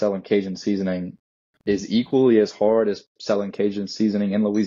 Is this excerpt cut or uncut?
uncut